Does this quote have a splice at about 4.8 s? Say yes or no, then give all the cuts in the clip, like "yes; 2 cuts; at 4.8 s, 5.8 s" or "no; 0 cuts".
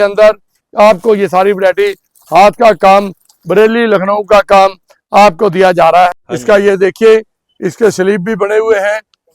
no; 1 cut; at 6.2 s